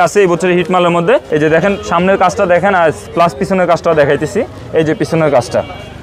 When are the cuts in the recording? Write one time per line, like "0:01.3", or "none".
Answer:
0:01.3